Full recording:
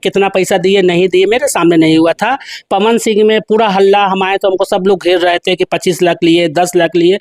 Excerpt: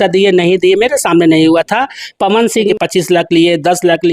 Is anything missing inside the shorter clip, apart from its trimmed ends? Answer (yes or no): yes